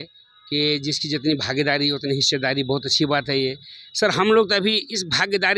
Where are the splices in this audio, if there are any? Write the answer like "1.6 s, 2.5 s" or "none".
none